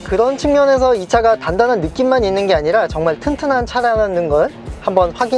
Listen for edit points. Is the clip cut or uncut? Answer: uncut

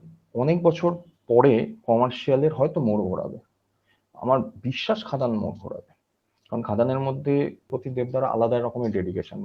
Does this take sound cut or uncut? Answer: cut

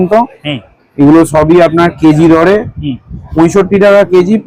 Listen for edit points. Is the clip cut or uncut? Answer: uncut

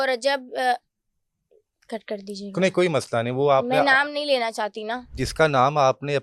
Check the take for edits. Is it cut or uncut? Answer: cut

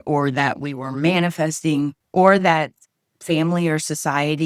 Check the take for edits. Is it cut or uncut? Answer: cut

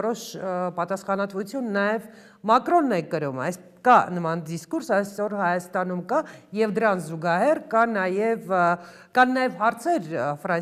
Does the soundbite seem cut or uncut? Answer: uncut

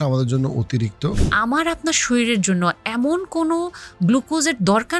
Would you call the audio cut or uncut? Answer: cut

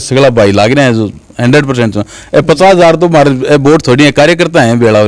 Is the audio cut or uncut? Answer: uncut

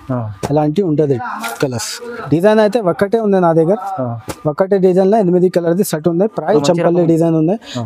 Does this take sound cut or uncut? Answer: cut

